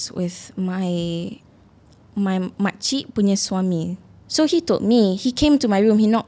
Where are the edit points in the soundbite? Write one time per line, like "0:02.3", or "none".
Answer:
0:04.0